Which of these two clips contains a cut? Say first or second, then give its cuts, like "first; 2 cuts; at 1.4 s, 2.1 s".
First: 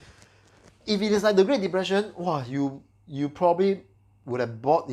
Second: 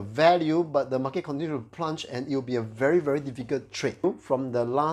second; 1 cut; at 4.0 s